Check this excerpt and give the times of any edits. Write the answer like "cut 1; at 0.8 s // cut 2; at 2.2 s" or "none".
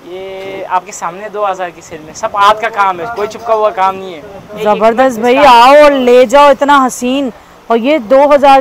none

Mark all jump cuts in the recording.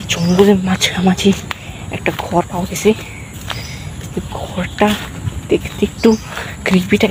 none

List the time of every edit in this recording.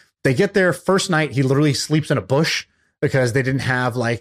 none

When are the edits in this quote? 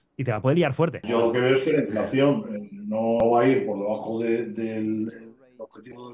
cut 1; at 1.0 s // cut 2; at 3.2 s

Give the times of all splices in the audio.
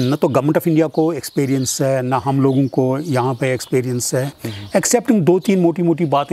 cut 1; at 4.4 s

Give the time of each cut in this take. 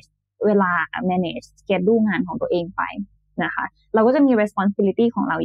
none

